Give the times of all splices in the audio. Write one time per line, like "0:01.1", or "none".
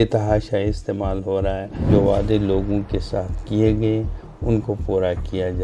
0:01.9

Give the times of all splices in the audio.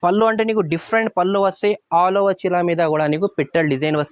none

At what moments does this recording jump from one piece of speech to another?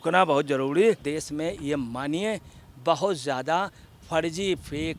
0:01.1

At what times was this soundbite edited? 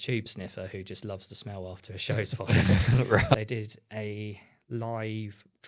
0:03.3

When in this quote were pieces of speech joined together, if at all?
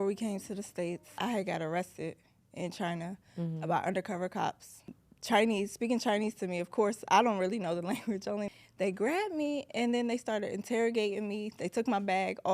0:01.1
0:04.9
0:08.5

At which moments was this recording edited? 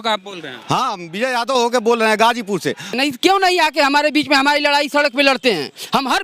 0:03.0

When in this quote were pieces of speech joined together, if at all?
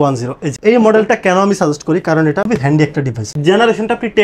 0:03.2

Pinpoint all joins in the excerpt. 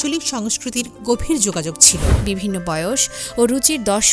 0:02.1

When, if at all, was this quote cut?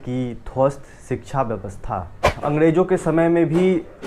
0:02.4

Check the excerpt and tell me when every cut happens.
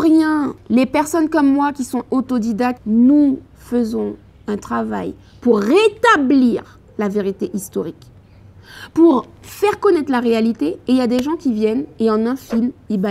0:02.8

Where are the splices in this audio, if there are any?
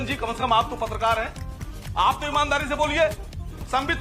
0:01.7

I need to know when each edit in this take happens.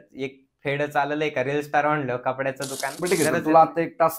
0:02.9

